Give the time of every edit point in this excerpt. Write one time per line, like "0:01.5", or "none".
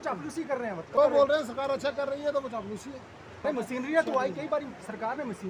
0:01.0
0:03.4